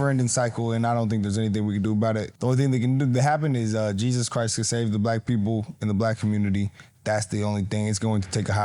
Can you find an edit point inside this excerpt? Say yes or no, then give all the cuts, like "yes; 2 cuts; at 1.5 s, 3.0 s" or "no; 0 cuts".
no; 0 cuts